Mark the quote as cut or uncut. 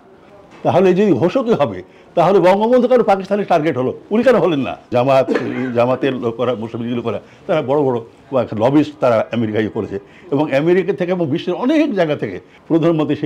cut